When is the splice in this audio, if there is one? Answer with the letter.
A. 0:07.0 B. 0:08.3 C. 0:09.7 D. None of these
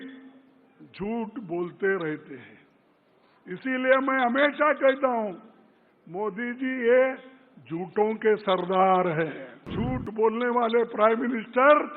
C